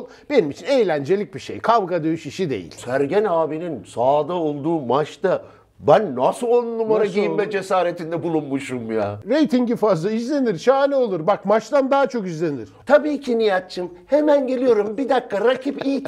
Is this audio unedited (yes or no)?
no